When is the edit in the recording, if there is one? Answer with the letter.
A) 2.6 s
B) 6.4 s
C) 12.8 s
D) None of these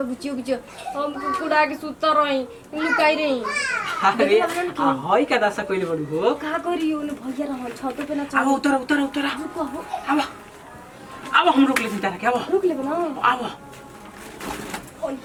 D